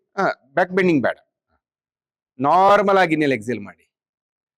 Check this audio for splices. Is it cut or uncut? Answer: uncut